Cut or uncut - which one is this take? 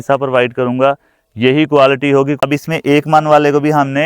cut